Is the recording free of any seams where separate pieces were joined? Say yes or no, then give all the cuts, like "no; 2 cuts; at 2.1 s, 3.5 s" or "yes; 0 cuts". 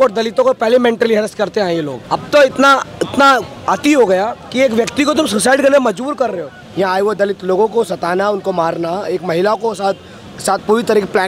no; 4 cuts; at 2.0 s, 3.5 s, 4.4 s, 6.6 s